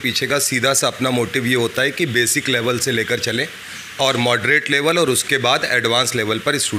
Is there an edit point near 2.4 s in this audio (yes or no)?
no